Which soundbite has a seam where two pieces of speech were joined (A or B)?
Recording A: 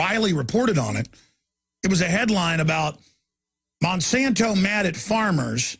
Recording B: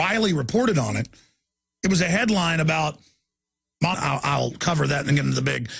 A